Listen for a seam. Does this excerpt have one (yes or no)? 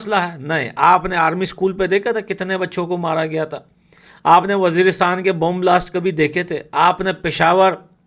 no